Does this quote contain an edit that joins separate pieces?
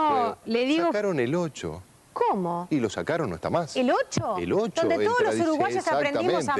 yes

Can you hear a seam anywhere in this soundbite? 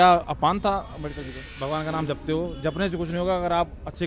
yes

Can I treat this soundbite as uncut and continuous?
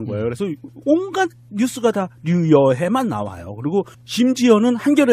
no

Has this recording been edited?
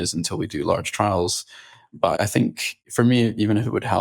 yes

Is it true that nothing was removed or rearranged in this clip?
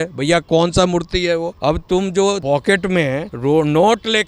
no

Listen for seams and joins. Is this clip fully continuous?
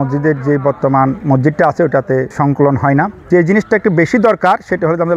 no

